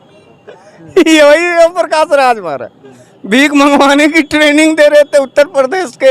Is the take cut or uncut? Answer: uncut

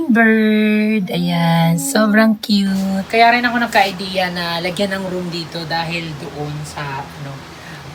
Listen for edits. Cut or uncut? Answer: uncut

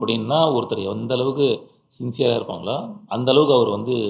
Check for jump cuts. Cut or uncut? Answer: uncut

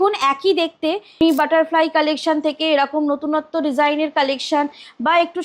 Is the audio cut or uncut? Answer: cut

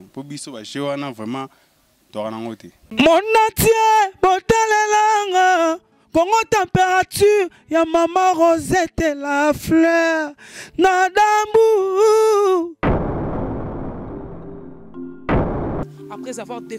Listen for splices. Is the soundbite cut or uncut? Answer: cut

